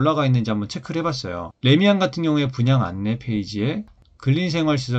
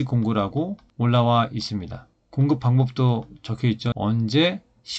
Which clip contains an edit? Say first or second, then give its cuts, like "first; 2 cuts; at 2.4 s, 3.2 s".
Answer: second; 1 cut; at 3.9 s